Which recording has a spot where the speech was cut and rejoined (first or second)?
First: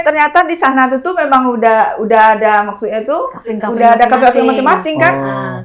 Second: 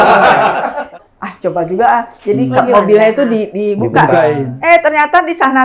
second